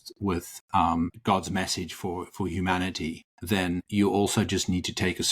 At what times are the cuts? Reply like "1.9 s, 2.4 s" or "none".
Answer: 1.2 s, 3.8 s